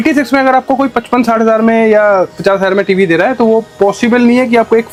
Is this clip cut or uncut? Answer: uncut